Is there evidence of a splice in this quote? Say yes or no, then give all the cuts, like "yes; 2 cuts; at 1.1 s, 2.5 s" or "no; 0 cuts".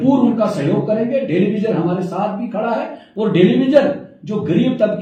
no; 0 cuts